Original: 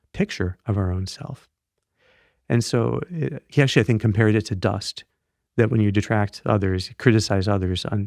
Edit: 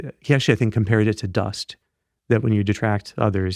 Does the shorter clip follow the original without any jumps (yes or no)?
yes